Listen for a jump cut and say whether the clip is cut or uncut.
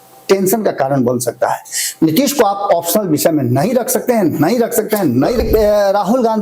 cut